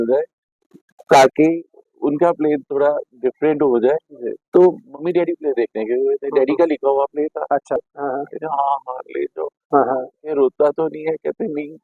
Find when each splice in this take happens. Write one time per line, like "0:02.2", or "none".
0:07.8